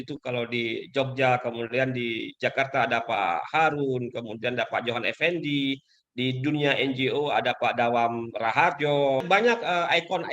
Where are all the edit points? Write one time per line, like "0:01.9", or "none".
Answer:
0:09.2

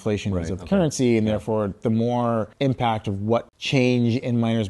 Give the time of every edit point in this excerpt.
0:02.5
0:03.6

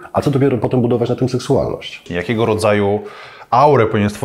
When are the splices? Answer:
0:02.1

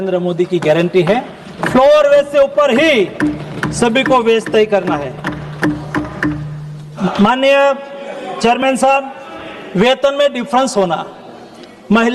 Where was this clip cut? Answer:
0:07.1

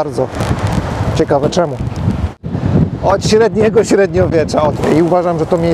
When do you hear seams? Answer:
0:02.4
0:04.8

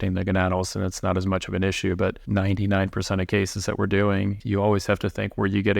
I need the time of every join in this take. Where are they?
0:02.2
0:04.4

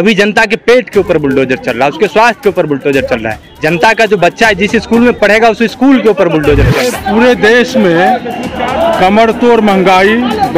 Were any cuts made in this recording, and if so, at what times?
0:07.0

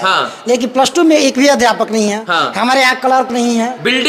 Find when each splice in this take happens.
none

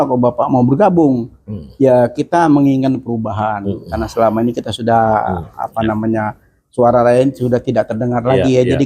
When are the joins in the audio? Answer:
none

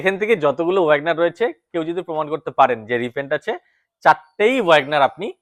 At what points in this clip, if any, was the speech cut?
none

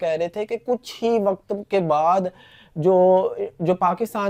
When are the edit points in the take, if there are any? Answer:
none

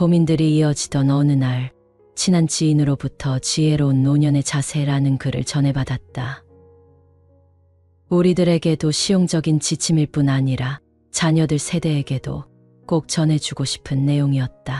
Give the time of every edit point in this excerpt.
none

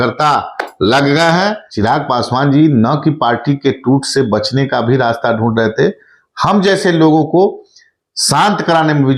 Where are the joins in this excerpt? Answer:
0:01.6

